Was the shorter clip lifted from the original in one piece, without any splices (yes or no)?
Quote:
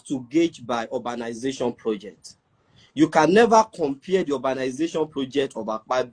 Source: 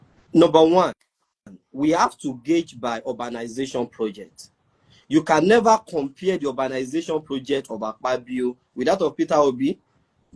yes